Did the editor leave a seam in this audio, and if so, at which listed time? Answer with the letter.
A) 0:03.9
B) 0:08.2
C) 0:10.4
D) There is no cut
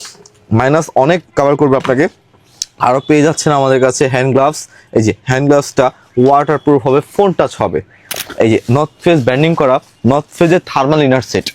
B